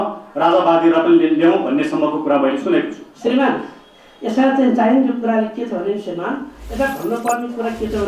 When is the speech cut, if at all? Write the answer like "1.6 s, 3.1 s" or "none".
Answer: 3.0 s